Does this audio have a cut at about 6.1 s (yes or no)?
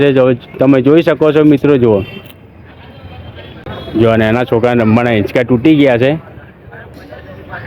no